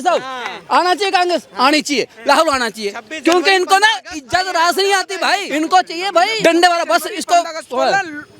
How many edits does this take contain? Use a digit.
2